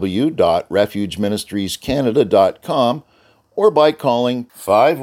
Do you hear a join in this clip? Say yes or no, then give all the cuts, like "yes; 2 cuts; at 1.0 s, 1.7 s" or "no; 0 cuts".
no; 0 cuts